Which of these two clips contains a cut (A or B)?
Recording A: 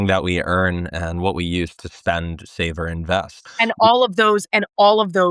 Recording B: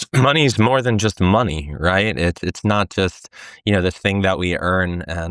A